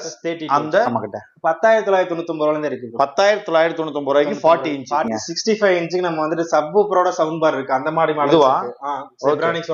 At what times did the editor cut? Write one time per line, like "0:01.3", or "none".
0:01.1
0:05.1